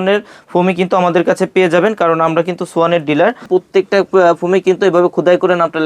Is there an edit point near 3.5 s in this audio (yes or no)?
yes